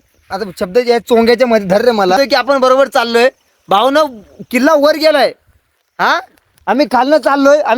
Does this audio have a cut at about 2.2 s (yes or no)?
yes